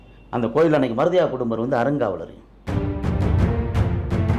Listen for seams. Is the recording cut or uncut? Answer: uncut